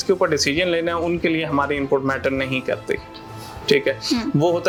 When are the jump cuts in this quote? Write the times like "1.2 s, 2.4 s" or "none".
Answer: none